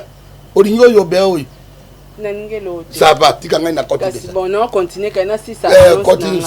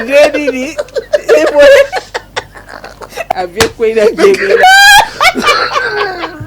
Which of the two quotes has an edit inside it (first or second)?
second